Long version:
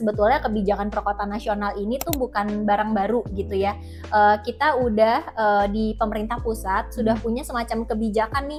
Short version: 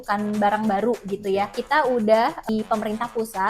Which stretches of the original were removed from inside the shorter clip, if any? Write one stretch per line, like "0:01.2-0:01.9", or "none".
0:03.8-0:04.5
0:05.4-0:05.8